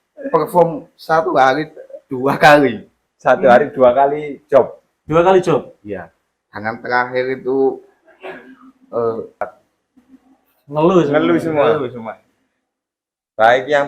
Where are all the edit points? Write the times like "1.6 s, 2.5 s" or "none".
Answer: 9.4 s